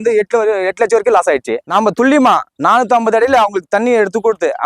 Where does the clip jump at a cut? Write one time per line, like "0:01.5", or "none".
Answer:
0:01.6